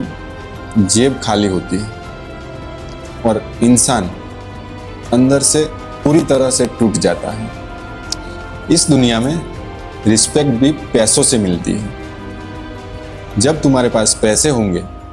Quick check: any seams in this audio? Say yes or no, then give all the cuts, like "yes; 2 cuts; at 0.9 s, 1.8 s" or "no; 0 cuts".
no; 0 cuts